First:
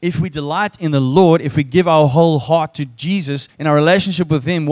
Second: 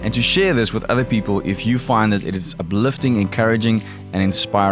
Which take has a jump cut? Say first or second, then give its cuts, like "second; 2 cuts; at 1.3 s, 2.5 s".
first; 1 cut; at 3.5 s